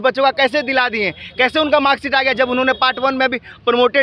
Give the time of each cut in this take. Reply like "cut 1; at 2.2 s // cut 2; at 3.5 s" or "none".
none

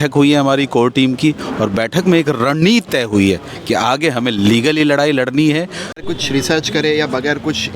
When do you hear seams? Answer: cut 1; at 6.1 s

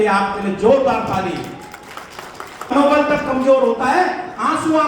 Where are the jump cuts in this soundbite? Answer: cut 1; at 2.7 s

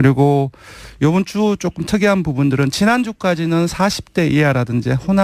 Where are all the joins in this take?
none

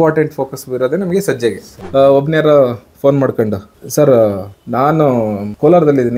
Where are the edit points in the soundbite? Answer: cut 1; at 1.7 s

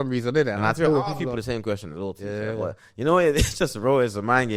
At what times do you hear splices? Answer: none

